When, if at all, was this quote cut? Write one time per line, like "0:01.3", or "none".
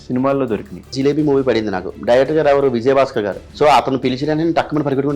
0:00.9
0:03.4